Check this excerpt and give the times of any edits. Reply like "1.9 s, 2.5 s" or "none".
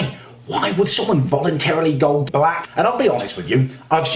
2.4 s